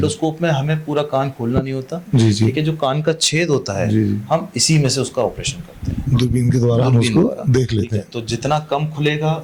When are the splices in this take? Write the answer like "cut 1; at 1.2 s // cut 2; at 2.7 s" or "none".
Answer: none